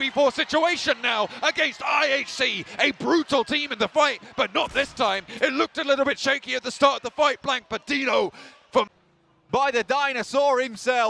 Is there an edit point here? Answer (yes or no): no